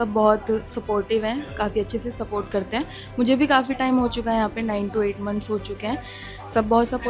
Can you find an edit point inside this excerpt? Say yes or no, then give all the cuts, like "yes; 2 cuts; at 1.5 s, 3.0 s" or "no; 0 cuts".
no; 0 cuts